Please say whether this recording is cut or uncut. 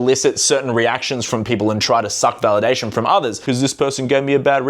cut